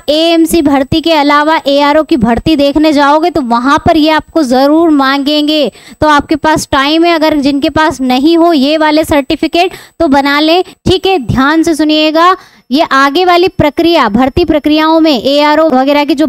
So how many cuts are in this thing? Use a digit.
0